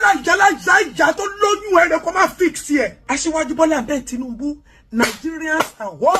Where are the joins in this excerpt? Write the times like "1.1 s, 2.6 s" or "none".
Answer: 3.0 s